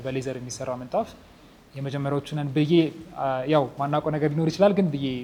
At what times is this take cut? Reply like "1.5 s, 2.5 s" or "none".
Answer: none